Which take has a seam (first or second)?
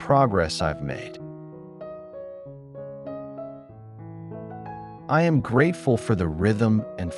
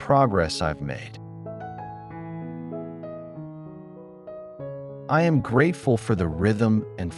first